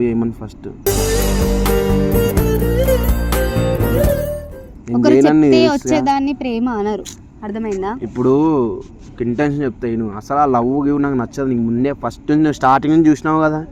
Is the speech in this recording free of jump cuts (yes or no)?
yes